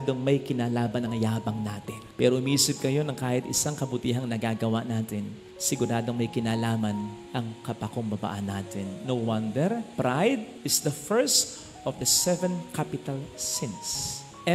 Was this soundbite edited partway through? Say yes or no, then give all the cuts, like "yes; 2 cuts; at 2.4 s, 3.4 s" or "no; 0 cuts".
no; 0 cuts